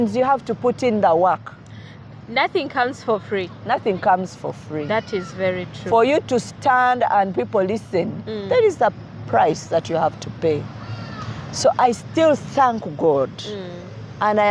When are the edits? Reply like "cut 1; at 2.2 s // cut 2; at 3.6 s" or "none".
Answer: none